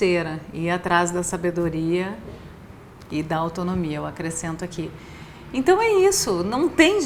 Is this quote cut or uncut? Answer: uncut